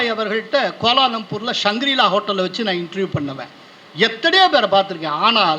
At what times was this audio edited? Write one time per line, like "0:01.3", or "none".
none